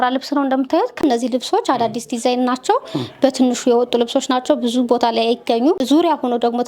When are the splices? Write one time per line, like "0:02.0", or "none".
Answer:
0:01.0
0:05.8